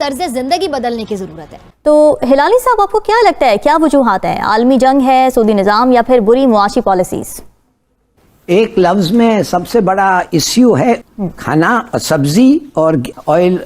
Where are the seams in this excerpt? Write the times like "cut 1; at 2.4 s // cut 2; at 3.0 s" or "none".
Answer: cut 1; at 1.6 s // cut 2; at 11.0 s